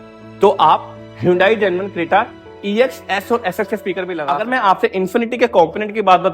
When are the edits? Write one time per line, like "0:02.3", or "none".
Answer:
0:04.4